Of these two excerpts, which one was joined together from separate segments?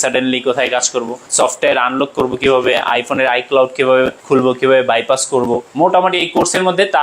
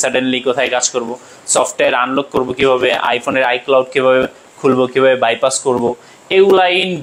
first; 3 cuts; at 1.2 s, 4.2 s, 5.7 s

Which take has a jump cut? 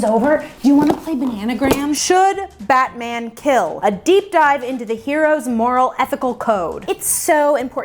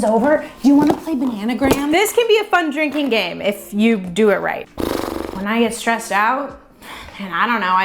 first; 3 cuts; at 1.9 s, 3.7 s, 6.8 s

